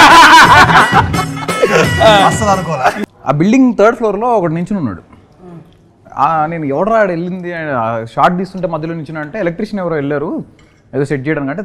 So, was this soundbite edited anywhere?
yes; 1 cut; at 3.0 s

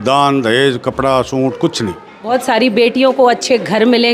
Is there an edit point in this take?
yes; 1 cut; at 2.1 s

